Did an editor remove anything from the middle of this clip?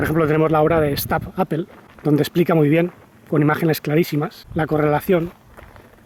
no; 0 cuts

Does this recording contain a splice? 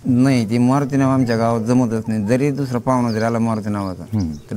no; 0 cuts

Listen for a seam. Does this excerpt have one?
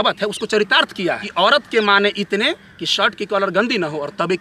yes; 1 cut; at 1.2 s

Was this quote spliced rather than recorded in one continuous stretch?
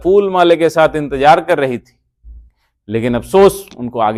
no; 0 cuts

